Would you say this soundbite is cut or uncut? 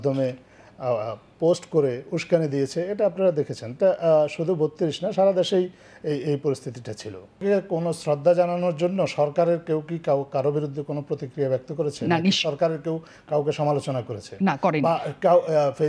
cut